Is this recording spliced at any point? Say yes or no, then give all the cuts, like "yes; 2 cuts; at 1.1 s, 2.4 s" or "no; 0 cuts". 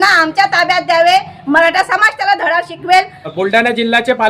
yes; 1 cut; at 3.3 s